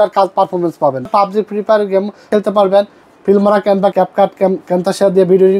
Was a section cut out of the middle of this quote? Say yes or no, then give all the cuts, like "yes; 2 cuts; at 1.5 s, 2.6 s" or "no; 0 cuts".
yes; 3 cuts; at 1.1 s, 2.3 s, 3.9 s